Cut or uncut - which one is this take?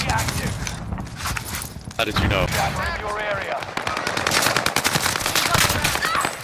cut